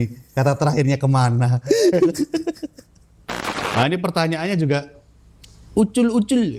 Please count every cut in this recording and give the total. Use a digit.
1